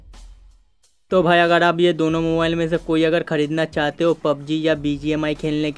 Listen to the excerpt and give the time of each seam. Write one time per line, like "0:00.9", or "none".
0:01.1